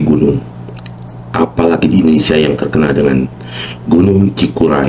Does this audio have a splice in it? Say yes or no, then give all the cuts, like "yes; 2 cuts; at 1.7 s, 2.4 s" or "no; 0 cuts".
no; 0 cuts